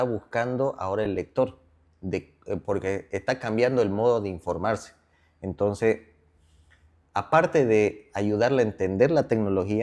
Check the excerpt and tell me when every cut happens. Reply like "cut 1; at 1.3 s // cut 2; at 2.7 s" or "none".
none